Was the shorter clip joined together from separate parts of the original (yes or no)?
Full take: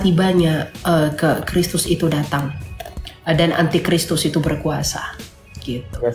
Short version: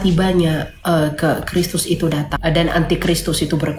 yes